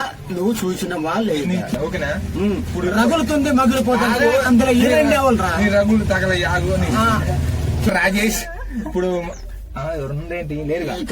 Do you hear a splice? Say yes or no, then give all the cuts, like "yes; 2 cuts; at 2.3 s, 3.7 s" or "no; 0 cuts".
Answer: yes; 1 cut; at 7.9 s